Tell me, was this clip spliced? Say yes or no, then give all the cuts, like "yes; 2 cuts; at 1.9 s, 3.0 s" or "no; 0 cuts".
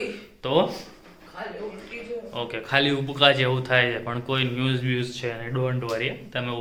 no; 0 cuts